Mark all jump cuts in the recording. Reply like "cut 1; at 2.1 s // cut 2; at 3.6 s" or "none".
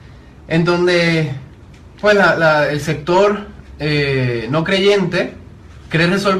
cut 1; at 4.0 s